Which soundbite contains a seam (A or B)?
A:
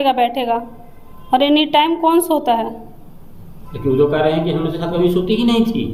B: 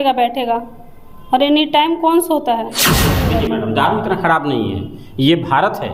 B